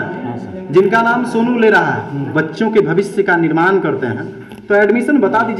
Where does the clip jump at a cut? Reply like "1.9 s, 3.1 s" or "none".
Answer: 2.3 s